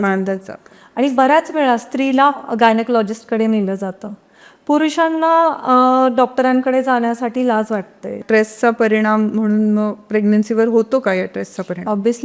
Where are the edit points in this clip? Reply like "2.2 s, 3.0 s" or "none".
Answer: 8.2 s